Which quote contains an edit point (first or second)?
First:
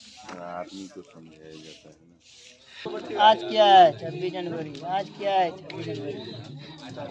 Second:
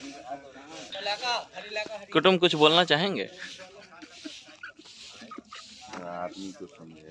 first